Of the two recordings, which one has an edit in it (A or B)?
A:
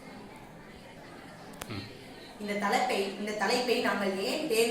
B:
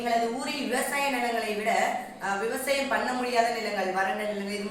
A